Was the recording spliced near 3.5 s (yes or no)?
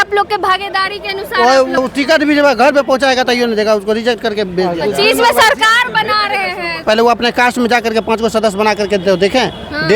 no